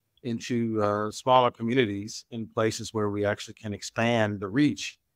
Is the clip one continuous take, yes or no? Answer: yes